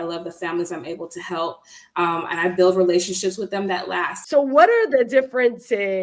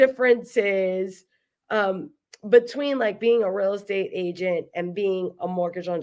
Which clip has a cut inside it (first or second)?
first